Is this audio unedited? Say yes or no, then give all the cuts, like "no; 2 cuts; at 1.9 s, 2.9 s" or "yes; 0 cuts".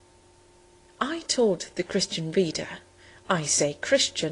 yes; 0 cuts